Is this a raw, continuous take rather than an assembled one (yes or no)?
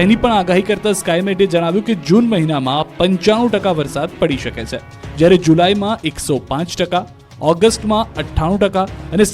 no